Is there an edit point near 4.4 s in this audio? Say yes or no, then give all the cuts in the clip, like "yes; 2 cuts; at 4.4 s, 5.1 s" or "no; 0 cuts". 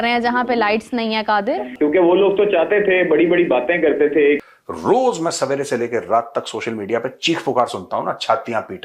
yes; 2 cuts; at 1.7 s, 4.4 s